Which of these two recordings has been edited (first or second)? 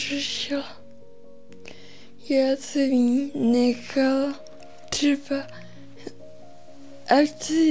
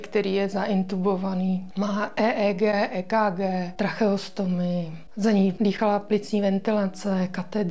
second